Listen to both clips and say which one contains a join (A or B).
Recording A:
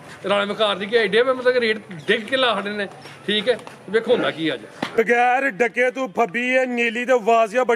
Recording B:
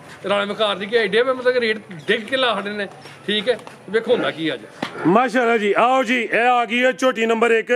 A